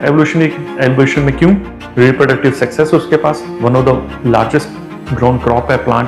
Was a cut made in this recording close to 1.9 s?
no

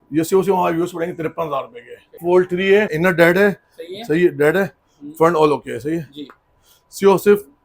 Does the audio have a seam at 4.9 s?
no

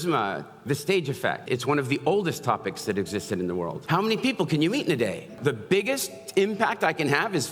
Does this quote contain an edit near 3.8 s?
yes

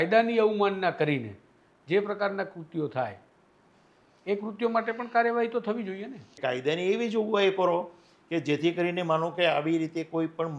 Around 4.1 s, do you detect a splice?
no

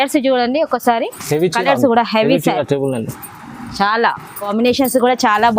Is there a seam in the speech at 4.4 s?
yes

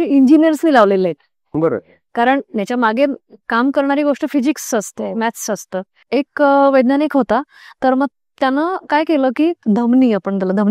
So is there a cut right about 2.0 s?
no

